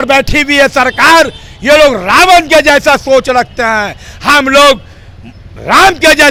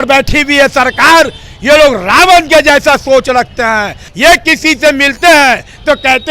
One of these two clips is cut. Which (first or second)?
second